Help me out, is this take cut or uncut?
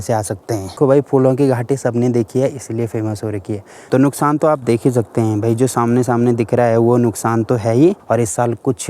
cut